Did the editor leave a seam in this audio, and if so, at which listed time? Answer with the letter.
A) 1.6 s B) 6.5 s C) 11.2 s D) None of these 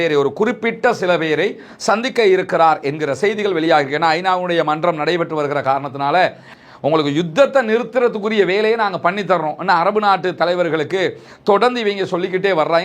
B